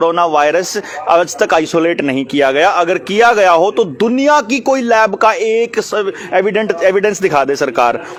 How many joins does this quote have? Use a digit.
0